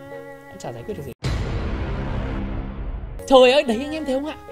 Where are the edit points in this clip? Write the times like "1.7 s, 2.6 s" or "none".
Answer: 1.2 s, 3.2 s